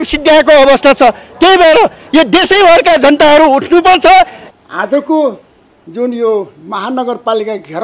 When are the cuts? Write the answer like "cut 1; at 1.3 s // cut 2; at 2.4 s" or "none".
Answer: cut 1; at 4.4 s

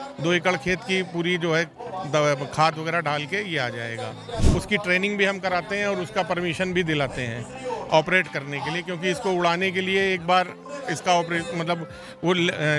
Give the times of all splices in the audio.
cut 1; at 4.4 s

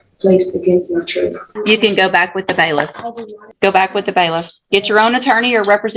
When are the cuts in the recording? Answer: cut 1; at 1.5 s // cut 2; at 3.5 s

